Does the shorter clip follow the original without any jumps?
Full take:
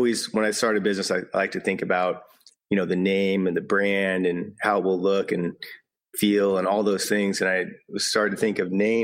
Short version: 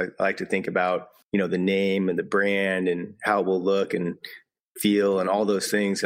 no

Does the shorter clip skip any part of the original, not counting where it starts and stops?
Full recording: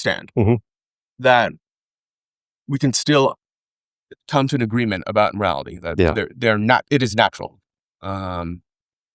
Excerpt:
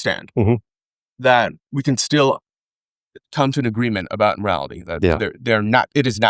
yes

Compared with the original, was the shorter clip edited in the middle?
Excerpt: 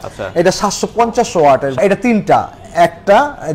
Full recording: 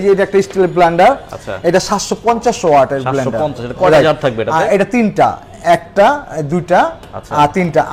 yes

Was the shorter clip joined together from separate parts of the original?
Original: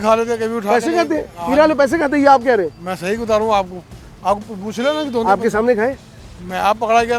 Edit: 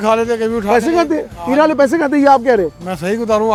no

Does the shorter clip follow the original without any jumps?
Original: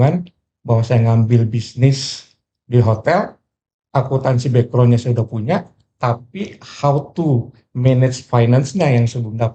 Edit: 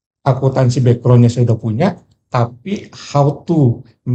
yes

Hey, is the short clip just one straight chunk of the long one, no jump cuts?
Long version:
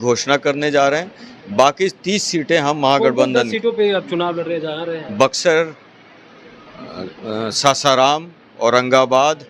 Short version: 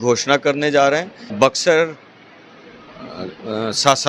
no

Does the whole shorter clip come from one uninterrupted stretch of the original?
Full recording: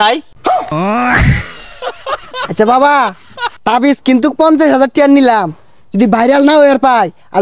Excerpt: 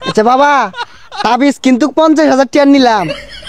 yes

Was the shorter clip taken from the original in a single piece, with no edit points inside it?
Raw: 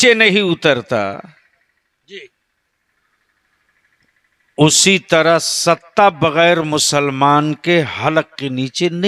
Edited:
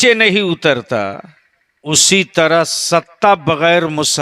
no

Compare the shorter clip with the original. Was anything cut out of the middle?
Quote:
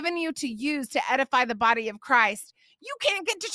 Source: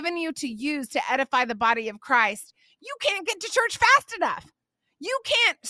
no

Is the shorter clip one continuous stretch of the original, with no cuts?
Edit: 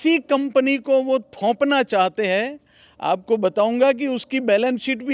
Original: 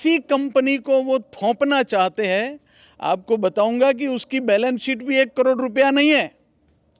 yes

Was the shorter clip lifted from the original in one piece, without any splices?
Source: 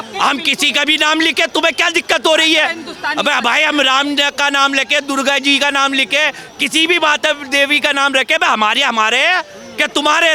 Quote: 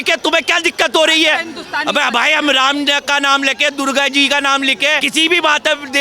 no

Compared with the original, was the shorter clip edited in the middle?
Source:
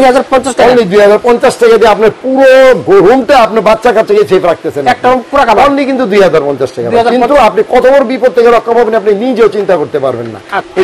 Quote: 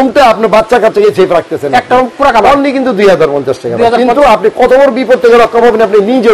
no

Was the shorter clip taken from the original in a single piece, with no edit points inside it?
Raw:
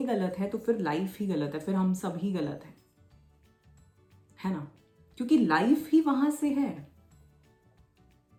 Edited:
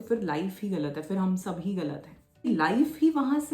no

